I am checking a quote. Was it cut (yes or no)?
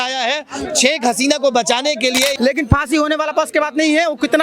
yes